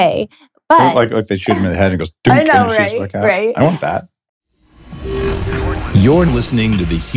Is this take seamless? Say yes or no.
no